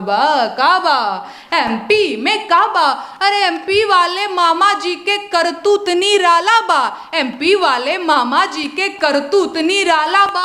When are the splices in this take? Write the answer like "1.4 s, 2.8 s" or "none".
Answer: none